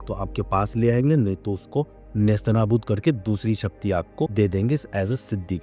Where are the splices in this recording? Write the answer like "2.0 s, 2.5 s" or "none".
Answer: none